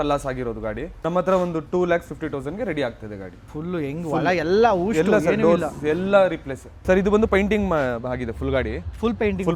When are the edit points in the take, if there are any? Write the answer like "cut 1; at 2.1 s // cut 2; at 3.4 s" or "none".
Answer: none